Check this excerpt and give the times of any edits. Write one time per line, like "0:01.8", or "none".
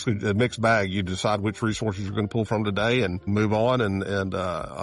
0:03.3